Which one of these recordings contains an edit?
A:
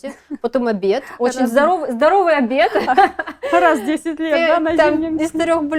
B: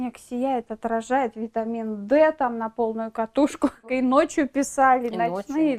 B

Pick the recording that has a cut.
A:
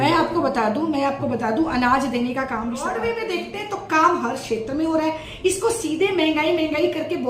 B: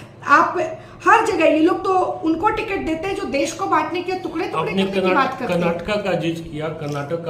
A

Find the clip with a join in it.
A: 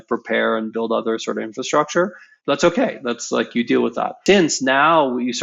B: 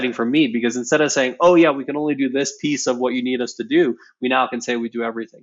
A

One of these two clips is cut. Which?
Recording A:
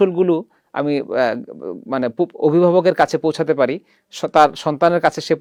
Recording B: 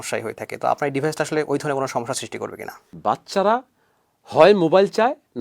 B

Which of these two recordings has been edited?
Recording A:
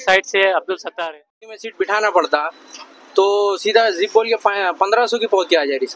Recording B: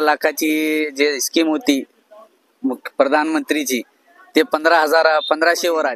A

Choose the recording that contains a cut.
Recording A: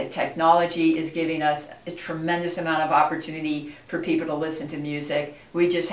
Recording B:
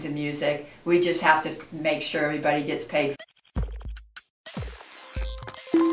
B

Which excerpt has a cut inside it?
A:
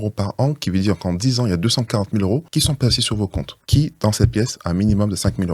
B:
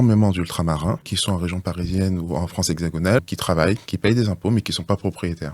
B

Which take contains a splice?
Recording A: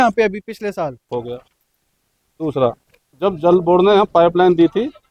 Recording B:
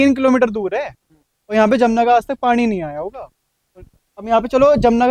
A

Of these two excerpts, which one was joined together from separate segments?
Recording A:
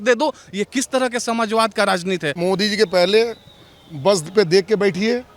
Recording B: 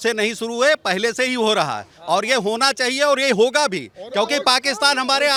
A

